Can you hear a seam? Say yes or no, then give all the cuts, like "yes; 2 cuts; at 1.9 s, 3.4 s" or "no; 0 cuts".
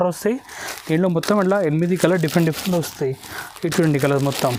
no; 0 cuts